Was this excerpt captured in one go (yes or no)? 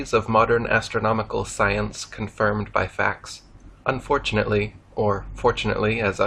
no